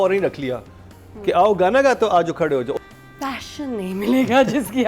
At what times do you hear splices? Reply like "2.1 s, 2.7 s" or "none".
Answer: 2.7 s